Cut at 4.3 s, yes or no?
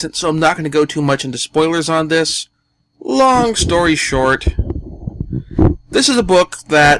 yes